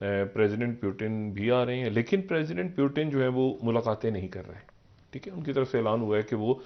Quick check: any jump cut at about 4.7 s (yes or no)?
no